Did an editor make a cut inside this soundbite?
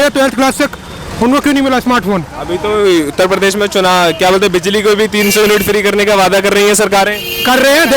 no; 0 cuts

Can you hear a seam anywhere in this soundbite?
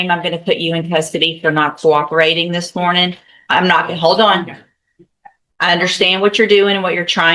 no; 0 cuts

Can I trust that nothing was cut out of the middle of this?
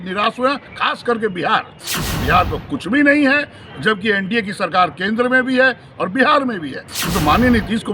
no; 1 cut; at 1.8 s

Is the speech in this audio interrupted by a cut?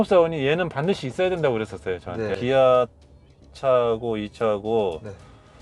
yes; 1 cut; at 2.3 s

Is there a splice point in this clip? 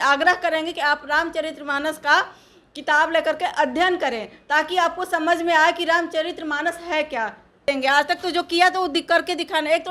yes; 1 cut; at 7.6 s

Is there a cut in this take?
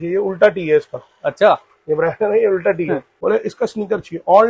yes; 1 cut; at 3.1 s

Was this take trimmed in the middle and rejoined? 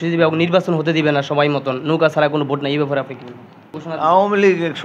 yes; 1 cut; at 3.8 s

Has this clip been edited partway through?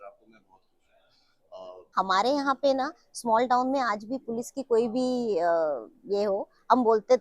yes; 1 cut; at 1.9 s

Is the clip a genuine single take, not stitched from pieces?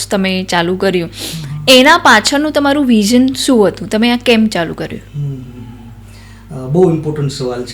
yes; 0 cuts

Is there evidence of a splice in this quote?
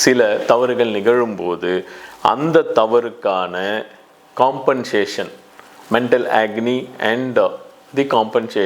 no; 0 cuts

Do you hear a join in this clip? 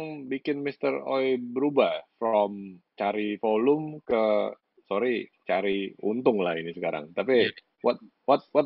no; 0 cuts

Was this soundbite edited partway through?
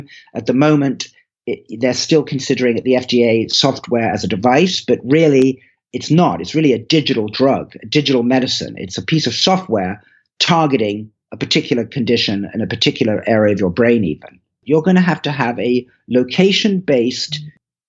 yes; 1 cut; at 14.6 s

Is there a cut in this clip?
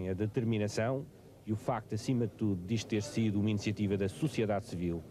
no; 0 cuts

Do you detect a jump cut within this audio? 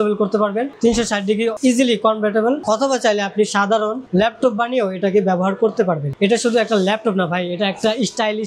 yes; 2 cuts; at 2.6 s, 6.1 s

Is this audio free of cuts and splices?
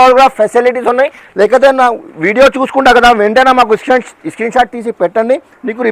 yes; 0 cuts

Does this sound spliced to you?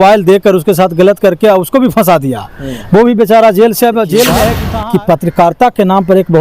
yes; 1 cut; at 4.6 s

